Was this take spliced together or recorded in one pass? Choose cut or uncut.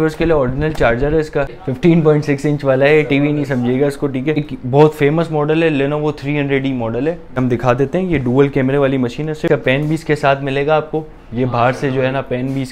cut